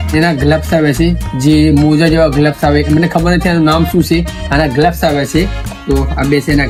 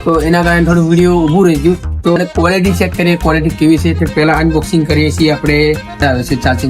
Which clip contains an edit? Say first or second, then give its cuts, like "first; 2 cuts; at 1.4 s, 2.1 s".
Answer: second; 2 cuts; at 2.2 s, 5.9 s